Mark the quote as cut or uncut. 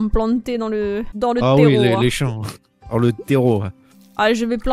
cut